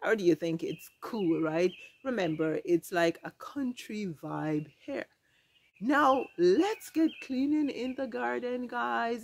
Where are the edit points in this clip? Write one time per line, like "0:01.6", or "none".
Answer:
none